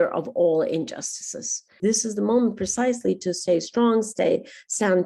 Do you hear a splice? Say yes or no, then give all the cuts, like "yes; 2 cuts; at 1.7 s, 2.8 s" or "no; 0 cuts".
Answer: yes; 1 cut; at 1.8 s